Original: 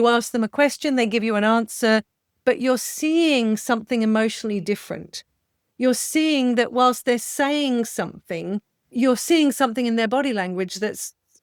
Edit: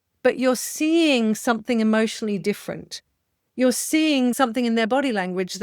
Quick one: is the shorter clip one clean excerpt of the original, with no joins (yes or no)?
no